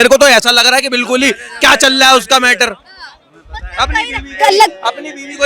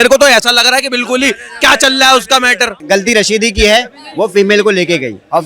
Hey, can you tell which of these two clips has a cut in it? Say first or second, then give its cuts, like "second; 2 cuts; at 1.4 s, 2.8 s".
second; 1 cut; at 2.8 s